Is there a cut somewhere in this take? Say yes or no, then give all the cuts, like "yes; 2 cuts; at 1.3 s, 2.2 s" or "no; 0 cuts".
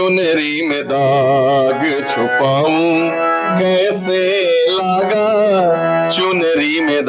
no; 0 cuts